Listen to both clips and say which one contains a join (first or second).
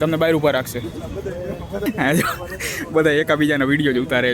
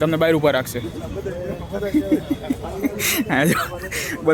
first